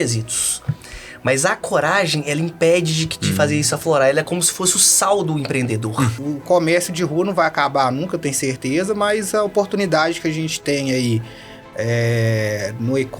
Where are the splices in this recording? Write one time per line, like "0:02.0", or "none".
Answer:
0:06.2